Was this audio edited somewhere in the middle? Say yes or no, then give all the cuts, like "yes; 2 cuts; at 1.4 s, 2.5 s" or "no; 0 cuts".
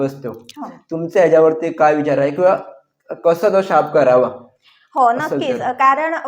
no; 0 cuts